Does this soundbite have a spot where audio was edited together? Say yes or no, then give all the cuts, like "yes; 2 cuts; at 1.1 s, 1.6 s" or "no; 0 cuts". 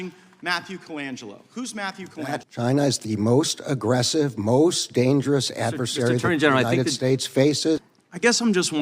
yes; 2 cuts; at 2.4 s, 7.9 s